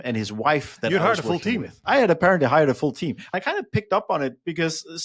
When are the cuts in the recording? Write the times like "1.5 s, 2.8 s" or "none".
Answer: 1.8 s, 3.3 s